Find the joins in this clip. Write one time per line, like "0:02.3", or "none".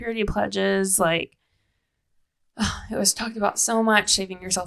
none